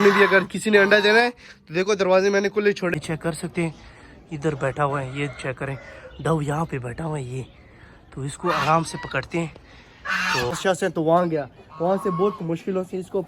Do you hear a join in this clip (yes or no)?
yes